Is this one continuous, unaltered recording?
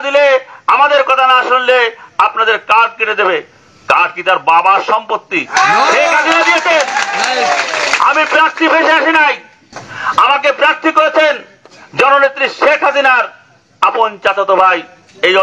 yes; 0 cuts

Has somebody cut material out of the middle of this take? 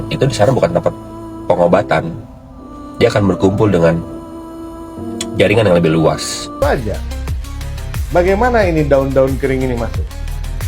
yes; 1 cut; at 6.6 s

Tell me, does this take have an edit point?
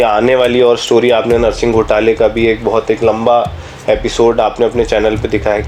no; 0 cuts

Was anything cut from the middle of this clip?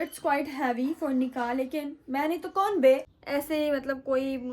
yes; 1 cut; at 3.1 s

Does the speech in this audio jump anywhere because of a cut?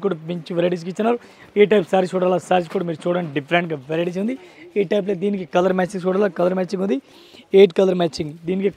no; 0 cuts

